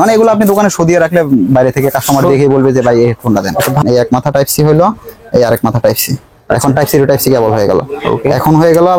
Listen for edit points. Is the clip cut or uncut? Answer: cut